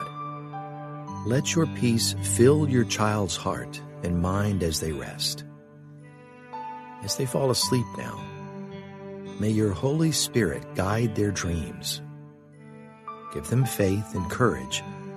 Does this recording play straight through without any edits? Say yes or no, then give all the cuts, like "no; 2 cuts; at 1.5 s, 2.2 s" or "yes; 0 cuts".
no; 2 cuts; at 11.7 s, 13.4 s